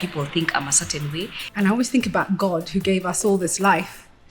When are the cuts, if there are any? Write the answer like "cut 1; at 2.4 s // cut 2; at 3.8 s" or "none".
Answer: cut 1; at 1.4 s